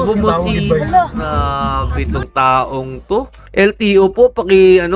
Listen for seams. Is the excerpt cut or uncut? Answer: uncut